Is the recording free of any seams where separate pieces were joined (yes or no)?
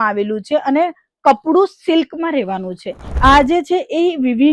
no